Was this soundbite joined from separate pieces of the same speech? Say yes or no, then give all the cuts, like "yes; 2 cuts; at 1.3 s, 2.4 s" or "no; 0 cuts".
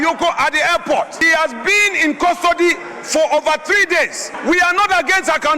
yes; 2 cuts; at 1.3 s, 4.2 s